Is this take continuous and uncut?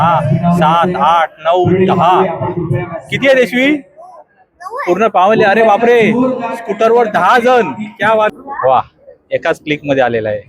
no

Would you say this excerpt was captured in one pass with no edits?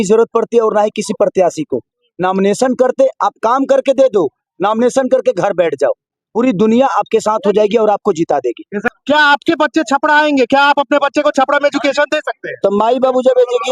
no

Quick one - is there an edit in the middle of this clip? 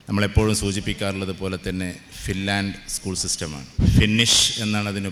no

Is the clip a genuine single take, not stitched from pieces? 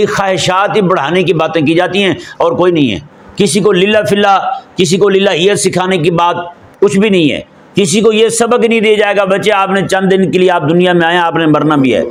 yes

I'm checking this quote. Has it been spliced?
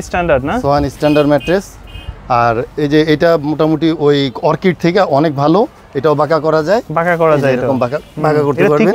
no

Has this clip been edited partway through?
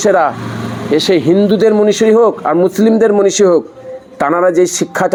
no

